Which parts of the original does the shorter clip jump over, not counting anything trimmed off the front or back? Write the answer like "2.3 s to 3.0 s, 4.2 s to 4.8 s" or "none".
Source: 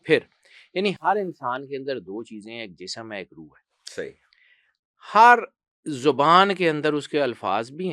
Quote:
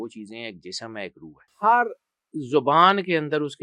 3.6 s to 5.0 s